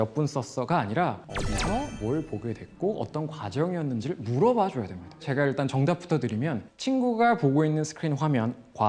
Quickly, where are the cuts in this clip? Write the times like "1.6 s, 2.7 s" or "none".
5.3 s